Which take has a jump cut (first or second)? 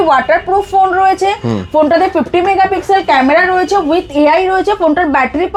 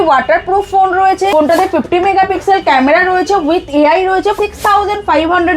second